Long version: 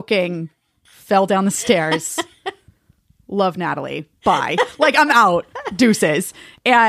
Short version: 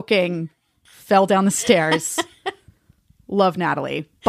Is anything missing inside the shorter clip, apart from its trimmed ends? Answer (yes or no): no